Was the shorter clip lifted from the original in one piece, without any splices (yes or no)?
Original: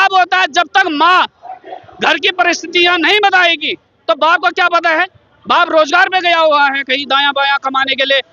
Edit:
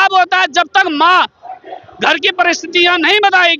yes